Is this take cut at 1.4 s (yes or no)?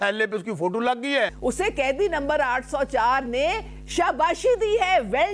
yes